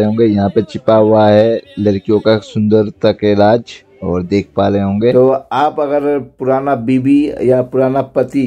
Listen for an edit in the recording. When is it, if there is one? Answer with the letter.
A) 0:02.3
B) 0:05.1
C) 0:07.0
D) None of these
B